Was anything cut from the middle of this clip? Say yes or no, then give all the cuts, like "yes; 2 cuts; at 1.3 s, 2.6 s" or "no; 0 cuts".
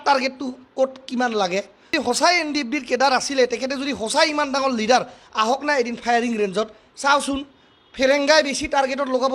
yes; 1 cut; at 1.9 s